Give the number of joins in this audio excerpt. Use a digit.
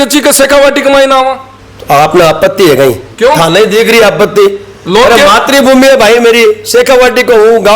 1